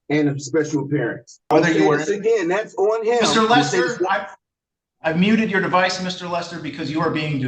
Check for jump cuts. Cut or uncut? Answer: cut